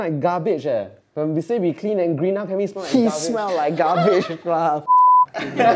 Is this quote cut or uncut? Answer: cut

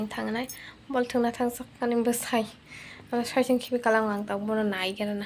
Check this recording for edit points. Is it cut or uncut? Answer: uncut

